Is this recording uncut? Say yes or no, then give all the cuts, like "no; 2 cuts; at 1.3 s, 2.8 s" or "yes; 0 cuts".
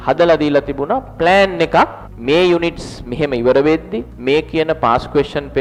yes; 0 cuts